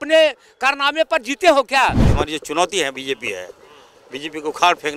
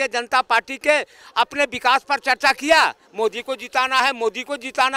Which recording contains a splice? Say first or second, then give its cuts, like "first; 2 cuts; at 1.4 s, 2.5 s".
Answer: first; 1 cut; at 2.1 s